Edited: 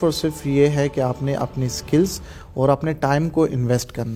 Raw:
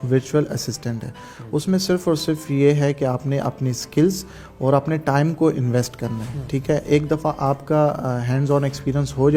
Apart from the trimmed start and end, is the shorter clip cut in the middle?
no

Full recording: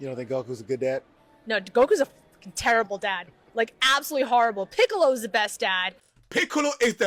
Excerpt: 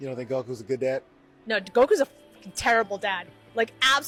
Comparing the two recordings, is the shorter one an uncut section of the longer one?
yes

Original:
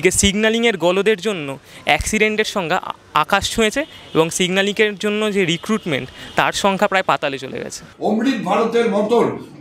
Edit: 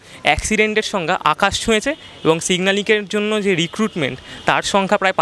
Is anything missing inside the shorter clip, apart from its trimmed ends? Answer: yes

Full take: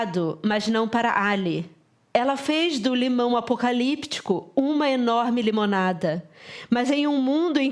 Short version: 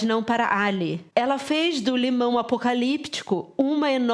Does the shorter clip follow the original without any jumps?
no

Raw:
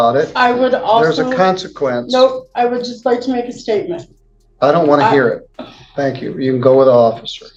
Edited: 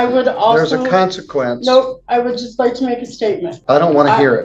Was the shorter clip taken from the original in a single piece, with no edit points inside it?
no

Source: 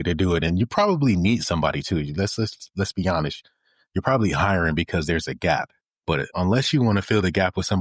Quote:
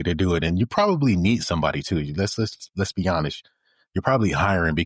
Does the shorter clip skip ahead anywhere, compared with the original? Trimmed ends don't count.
no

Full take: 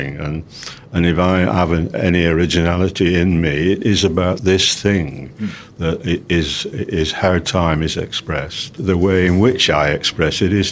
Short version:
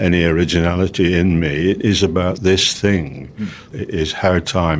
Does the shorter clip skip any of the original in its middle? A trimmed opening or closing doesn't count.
yes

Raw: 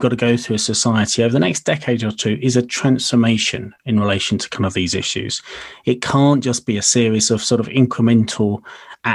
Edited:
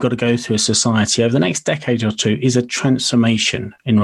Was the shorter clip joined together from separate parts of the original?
no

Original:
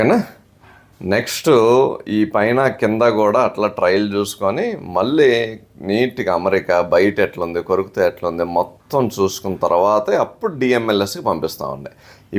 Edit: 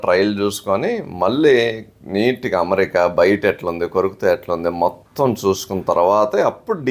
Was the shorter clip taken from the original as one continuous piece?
yes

